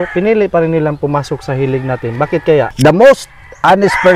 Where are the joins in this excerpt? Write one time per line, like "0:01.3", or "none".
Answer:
0:02.7